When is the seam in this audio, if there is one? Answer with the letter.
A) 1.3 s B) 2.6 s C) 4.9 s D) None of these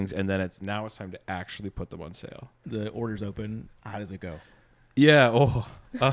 B